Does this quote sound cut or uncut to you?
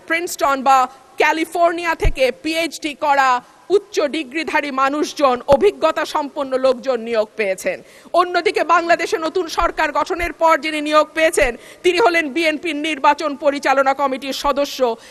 uncut